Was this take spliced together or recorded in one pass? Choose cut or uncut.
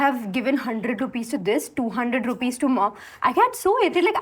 uncut